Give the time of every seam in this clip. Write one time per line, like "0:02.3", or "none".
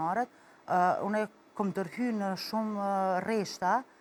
none